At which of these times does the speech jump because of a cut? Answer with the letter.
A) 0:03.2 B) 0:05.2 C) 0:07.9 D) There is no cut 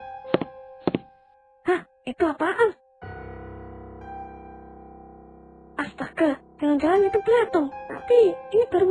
D